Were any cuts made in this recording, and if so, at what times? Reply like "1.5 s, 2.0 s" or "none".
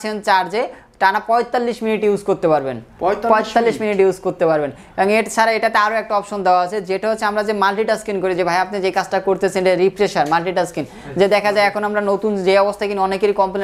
none